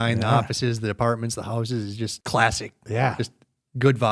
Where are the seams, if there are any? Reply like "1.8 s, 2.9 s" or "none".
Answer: 2.2 s